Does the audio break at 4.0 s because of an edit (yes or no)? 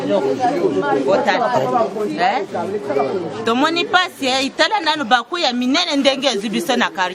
no